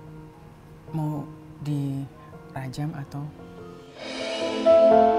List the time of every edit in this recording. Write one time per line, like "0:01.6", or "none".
0:04.1